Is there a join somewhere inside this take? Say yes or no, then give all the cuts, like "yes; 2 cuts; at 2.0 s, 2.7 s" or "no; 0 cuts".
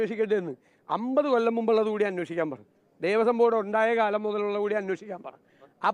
no; 0 cuts